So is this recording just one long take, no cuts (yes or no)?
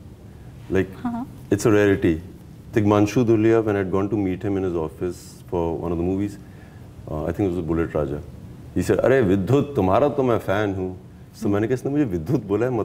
yes